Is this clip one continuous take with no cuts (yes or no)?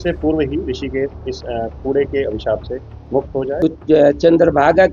no